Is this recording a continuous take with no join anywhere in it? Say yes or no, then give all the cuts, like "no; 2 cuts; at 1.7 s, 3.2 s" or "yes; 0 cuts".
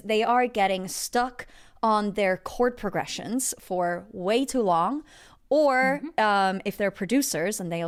yes; 0 cuts